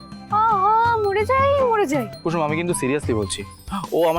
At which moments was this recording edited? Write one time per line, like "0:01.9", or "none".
0:02.1